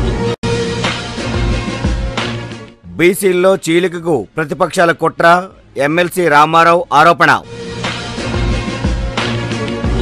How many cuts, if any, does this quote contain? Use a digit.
1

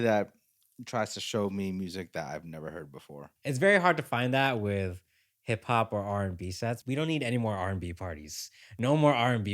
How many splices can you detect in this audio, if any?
2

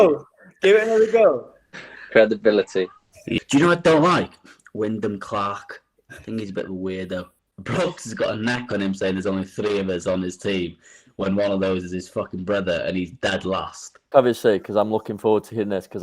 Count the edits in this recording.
3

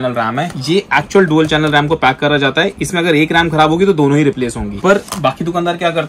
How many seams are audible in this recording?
1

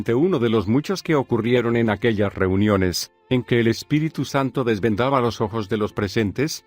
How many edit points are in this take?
1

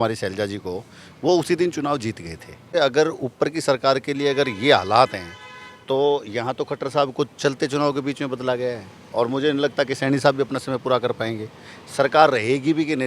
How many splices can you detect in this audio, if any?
1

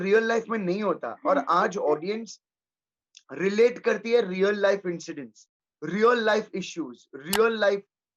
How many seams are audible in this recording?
0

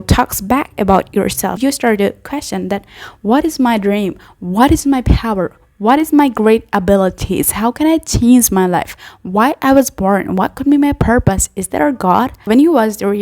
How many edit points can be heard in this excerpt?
2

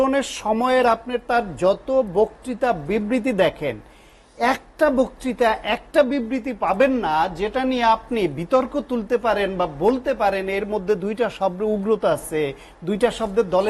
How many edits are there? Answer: 0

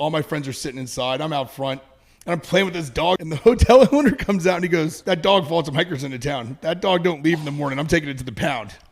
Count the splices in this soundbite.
2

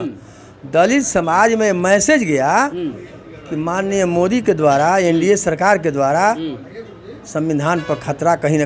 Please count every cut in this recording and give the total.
0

